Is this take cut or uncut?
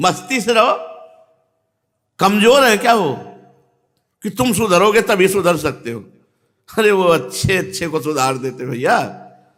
uncut